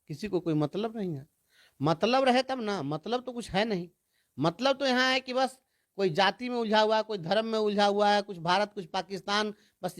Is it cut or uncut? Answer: uncut